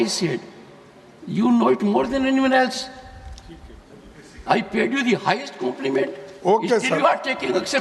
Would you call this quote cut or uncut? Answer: uncut